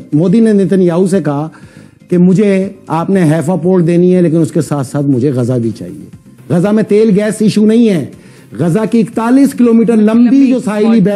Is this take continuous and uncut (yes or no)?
yes